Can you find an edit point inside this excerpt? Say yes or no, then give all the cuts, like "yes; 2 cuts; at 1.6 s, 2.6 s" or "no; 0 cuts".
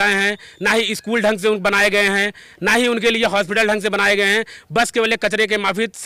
no; 0 cuts